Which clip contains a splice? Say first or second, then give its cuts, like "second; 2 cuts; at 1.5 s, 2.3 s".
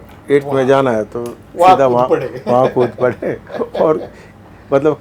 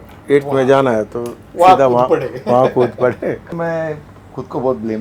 second; 1 cut; at 3.5 s